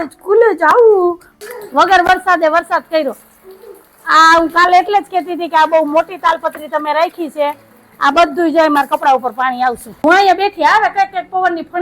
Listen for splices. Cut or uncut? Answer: cut